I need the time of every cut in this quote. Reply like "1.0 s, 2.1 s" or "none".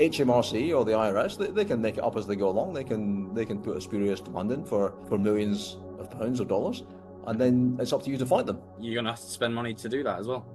5.0 s, 8.8 s